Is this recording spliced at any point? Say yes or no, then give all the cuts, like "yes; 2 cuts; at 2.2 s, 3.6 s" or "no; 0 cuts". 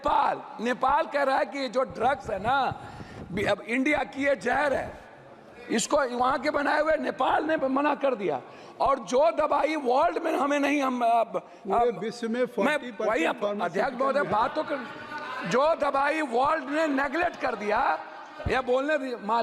no; 0 cuts